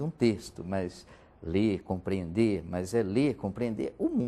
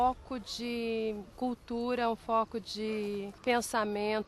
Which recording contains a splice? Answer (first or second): second